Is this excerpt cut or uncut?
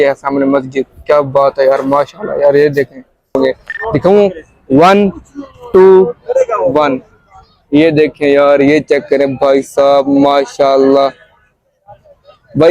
cut